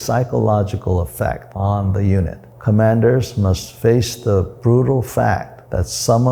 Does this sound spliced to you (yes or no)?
yes